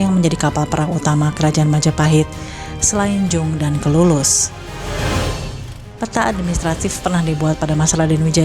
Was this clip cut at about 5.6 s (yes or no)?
yes